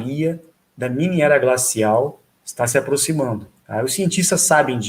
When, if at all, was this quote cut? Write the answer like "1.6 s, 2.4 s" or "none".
3.5 s